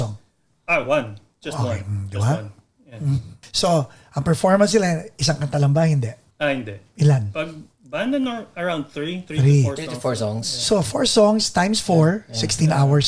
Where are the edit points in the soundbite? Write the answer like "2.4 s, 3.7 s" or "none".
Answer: 3.4 s, 6.2 s